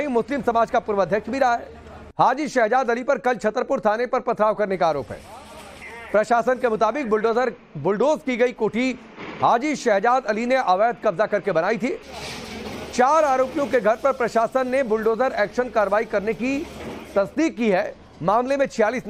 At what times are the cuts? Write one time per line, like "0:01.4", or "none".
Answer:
none